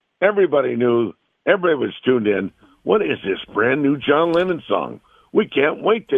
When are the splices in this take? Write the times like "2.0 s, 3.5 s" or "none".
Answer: none